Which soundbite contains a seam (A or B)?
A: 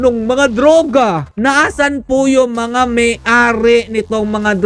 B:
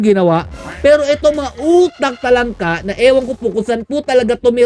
A